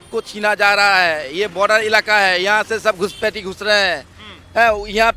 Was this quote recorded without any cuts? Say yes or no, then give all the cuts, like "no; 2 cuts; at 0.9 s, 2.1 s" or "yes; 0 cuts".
yes; 0 cuts